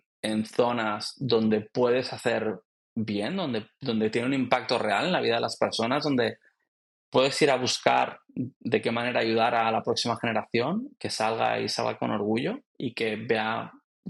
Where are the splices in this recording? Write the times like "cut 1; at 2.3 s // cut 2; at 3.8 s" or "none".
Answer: none